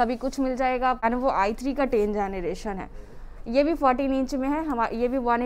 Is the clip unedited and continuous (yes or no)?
no